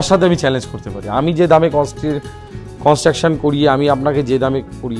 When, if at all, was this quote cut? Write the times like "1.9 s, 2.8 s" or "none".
none